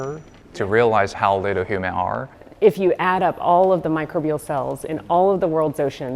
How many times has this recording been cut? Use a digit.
2